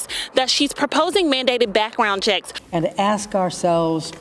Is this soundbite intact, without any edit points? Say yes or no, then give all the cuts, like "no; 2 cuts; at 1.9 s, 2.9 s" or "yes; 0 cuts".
no; 1 cut; at 2.5 s